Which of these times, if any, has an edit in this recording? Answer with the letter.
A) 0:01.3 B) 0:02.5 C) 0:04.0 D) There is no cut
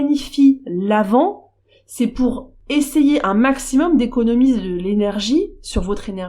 B